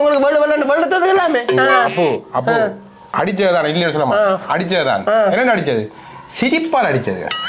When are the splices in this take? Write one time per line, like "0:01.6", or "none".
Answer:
none

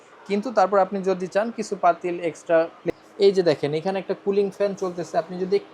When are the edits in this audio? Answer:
0:02.8

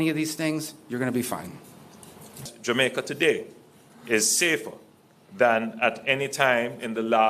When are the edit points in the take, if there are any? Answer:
0:02.8

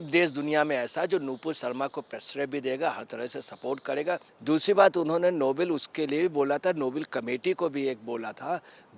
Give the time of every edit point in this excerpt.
0:04.3

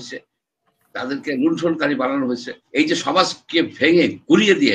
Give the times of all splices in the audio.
0:02.6

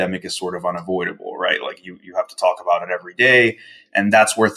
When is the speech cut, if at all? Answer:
none

